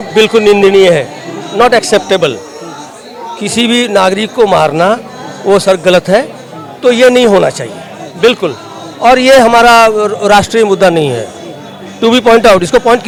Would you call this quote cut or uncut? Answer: uncut